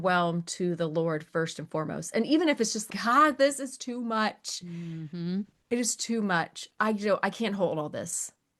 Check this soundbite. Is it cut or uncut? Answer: uncut